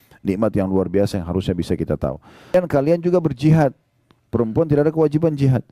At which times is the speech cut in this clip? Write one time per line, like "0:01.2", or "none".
0:02.5